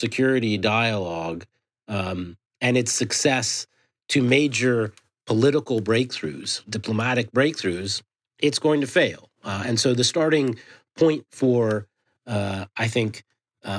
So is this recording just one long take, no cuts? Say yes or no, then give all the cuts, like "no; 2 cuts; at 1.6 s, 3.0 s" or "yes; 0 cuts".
yes; 0 cuts